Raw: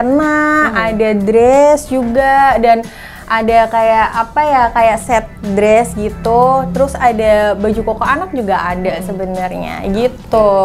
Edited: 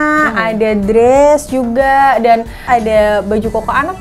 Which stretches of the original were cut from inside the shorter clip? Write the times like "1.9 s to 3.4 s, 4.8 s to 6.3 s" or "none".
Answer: 3.0 s to 6.9 s

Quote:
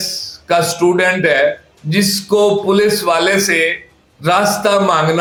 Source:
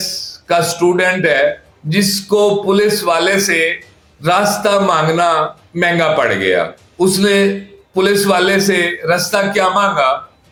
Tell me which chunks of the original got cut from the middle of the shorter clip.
none

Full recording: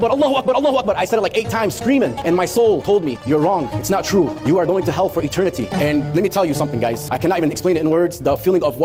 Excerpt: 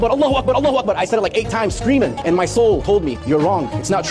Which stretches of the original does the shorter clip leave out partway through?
none

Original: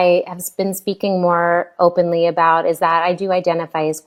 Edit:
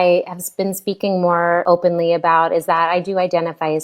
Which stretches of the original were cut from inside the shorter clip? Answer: 1.6 s to 1.8 s

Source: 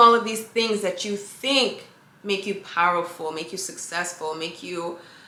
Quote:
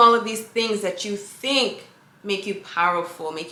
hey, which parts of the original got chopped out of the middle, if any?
none

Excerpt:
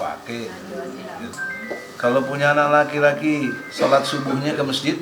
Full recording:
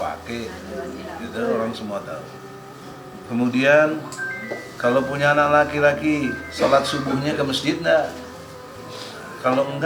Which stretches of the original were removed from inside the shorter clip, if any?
1.3 s to 4.1 s

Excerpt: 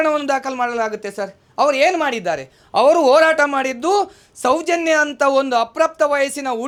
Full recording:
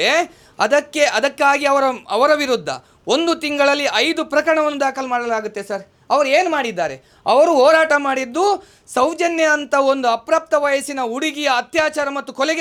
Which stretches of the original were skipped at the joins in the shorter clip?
none

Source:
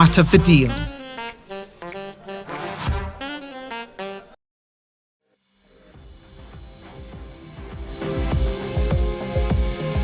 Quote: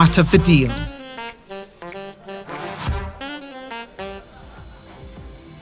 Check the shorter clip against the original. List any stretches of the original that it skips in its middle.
4.3 s to 6.3 s

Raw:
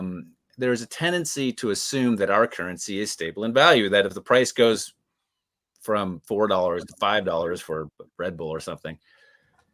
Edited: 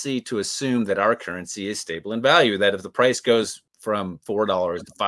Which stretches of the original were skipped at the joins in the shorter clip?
5.0 s to 5.7 s

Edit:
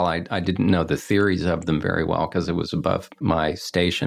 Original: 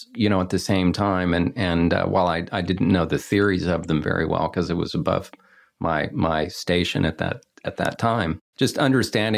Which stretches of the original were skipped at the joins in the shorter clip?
5.4 s to 6.1 s

